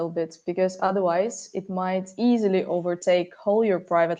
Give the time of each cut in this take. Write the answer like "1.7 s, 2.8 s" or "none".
none